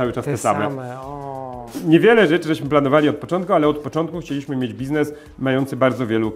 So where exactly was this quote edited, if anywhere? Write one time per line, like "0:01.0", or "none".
0:01.7